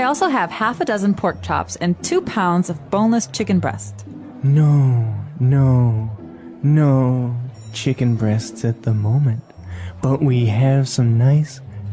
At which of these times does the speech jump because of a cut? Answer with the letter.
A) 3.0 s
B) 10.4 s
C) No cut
C